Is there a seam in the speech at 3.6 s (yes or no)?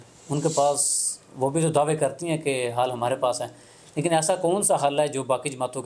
no